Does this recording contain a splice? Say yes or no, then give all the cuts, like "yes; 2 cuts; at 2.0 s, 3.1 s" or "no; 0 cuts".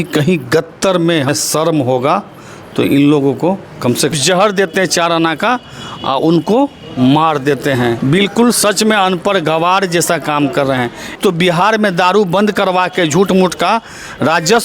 yes; 4 cuts; at 1.3 s, 4.1 s, 8.0 s, 11.2 s